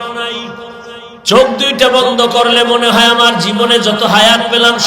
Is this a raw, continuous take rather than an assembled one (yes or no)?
no